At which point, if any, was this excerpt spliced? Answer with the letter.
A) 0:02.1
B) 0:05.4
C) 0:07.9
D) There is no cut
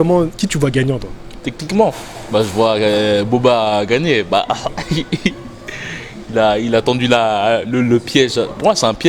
D